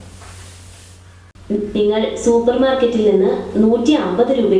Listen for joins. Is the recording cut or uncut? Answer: cut